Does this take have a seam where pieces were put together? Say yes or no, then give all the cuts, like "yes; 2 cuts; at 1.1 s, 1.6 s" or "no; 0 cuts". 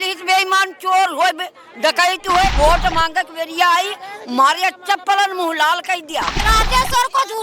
yes; 2 cuts; at 2.5 s, 6.4 s